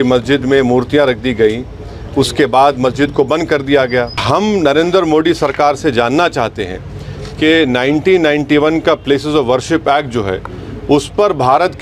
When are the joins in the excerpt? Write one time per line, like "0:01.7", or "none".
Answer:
0:04.2